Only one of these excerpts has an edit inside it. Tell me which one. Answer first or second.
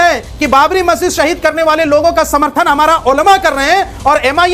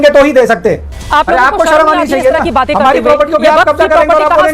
second